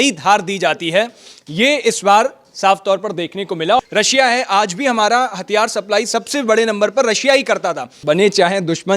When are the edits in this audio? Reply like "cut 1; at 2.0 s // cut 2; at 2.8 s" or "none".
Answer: cut 1; at 3.8 s // cut 2; at 7.9 s

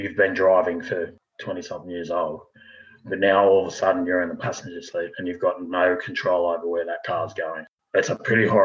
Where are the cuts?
none

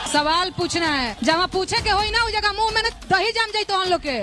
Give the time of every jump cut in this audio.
cut 1; at 1.1 s

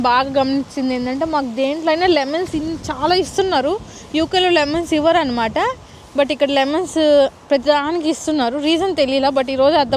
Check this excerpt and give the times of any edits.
none

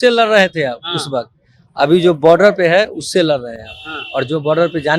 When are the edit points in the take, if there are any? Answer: none

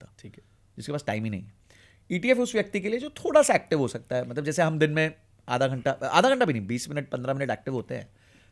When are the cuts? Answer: none

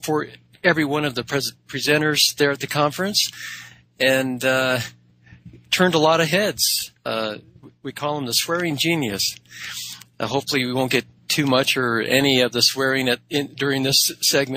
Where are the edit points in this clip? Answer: cut 1; at 7.7 s

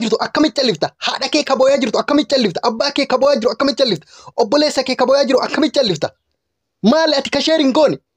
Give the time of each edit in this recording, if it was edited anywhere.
none

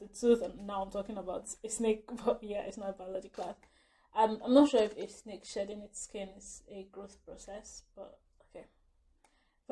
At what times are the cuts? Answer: none

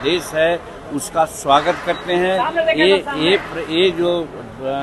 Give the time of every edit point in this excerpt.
none

